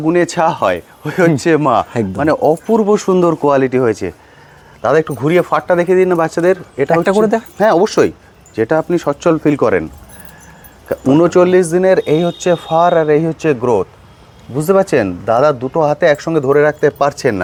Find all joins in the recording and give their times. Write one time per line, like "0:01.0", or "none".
none